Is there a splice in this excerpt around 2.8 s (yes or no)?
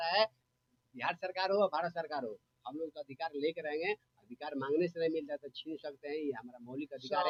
no